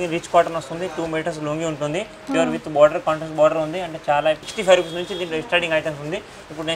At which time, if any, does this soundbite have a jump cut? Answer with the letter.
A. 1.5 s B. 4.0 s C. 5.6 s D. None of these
D